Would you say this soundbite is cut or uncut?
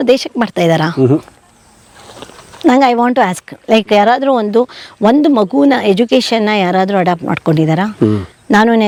uncut